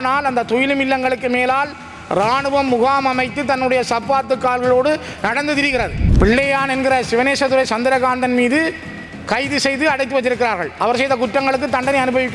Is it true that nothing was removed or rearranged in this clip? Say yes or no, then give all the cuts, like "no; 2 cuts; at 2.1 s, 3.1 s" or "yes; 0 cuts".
no; 1 cut; at 6.0 s